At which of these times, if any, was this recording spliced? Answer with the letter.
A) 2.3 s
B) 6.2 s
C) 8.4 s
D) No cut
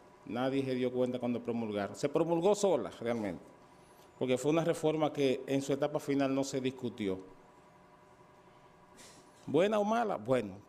C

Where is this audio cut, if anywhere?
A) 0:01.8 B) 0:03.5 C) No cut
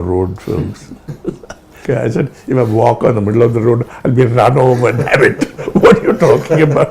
A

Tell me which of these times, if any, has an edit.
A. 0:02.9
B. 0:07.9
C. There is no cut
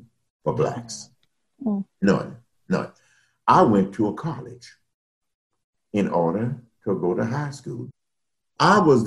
B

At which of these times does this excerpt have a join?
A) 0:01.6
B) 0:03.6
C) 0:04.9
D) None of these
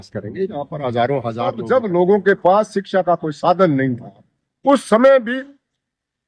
A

